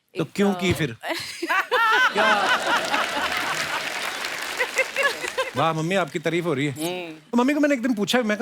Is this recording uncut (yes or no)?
no